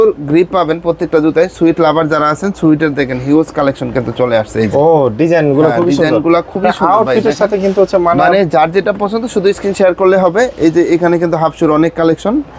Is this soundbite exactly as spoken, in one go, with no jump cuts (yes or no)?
yes